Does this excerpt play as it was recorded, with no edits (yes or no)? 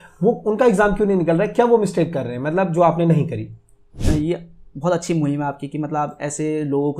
no